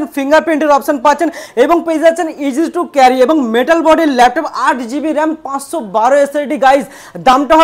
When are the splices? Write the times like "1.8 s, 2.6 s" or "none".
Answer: none